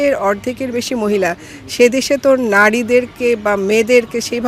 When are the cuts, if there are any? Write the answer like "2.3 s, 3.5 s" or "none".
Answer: none